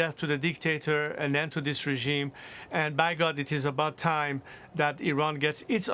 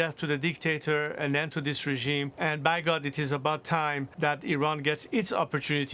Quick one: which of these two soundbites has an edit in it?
second; 2 cuts; at 2.3 s, 4.1 s

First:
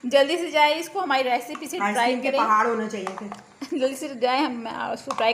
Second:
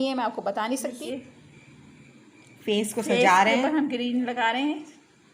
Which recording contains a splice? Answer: second; 1 cut; at 1.0 s

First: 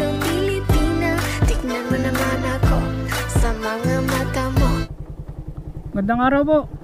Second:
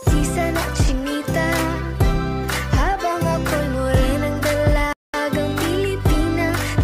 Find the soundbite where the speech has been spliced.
first; 1 cut; at 4.9 s

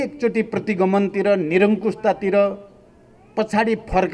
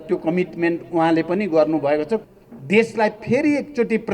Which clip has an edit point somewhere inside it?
second; 1 cut; at 2.3 s

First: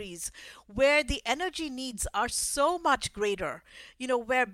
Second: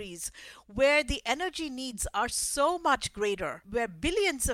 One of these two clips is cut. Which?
second; 1 cut; at 3.6 s

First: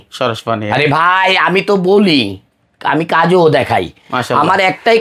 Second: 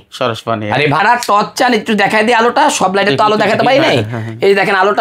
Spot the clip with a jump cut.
second; 1 cut; at 1.0 s

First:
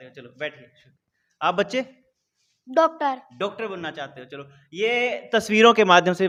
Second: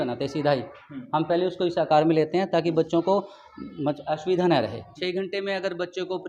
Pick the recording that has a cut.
second; 1 cut; at 4.9 s

